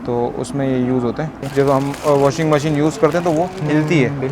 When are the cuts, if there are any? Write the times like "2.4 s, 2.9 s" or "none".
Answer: 1.4 s

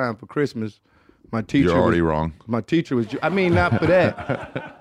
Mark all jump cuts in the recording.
none

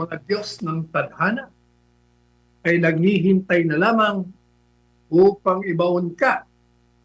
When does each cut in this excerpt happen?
none

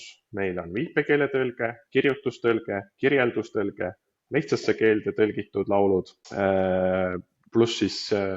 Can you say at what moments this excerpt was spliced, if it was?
6.2 s

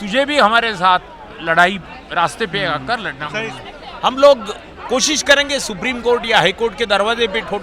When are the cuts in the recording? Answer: 3.3 s

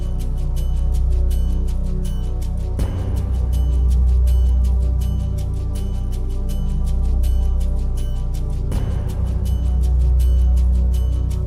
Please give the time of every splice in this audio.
none

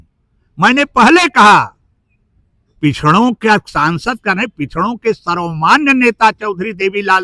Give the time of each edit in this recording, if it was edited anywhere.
none

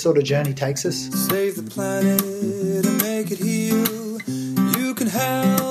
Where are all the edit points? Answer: 1.0 s

